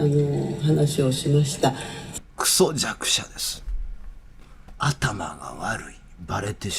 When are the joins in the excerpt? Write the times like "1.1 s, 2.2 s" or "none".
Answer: 2.0 s, 4.7 s